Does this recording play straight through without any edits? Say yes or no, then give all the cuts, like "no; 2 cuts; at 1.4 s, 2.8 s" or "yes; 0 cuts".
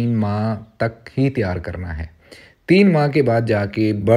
yes; 0 cuts